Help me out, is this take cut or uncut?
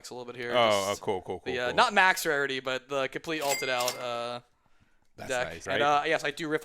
cut